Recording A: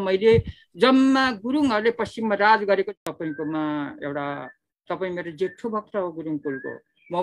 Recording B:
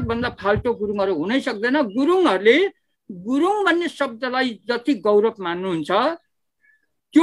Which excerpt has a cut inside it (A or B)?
A